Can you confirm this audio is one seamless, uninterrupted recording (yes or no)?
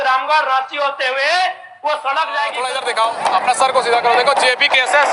no